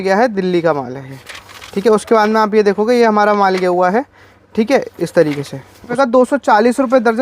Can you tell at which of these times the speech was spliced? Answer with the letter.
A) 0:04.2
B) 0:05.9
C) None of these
B